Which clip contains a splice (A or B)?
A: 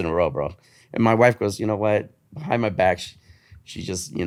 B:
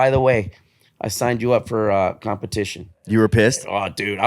B